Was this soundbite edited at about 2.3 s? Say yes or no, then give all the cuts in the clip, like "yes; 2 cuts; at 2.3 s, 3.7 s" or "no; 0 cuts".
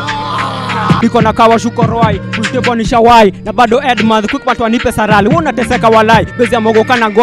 no; 1 cut; at 1.0 s